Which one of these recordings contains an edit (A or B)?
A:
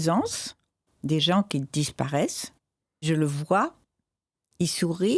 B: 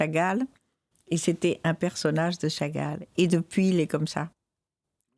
A